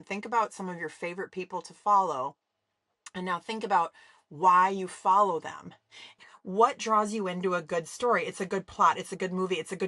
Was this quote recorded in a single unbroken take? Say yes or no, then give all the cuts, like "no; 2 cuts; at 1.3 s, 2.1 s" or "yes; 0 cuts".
no; 1 cut; at 6.1 s